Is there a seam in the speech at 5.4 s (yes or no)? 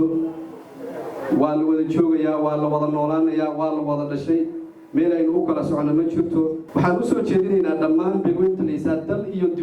no